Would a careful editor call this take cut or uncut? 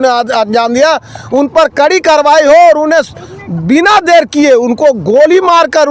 uncut